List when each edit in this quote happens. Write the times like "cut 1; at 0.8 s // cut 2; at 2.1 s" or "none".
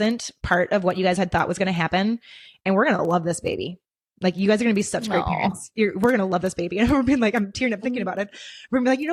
none